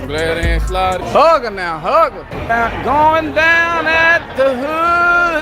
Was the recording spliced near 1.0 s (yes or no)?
yes